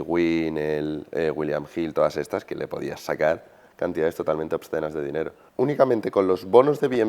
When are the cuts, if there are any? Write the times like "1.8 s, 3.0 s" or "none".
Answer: 5.4 s